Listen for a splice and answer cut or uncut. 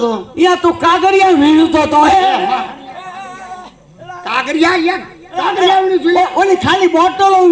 uncut